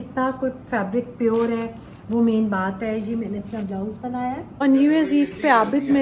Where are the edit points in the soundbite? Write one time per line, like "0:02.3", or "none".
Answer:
0:04.4